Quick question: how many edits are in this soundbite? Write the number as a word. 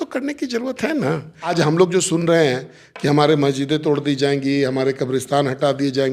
one